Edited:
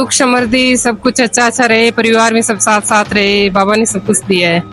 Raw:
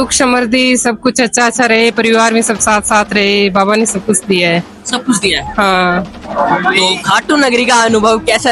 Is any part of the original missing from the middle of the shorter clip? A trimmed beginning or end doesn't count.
no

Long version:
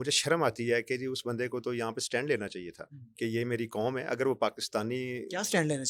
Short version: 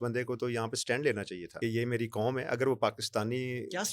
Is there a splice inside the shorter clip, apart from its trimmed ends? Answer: yes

